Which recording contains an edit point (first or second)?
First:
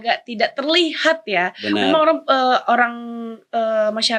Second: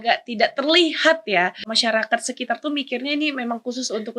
second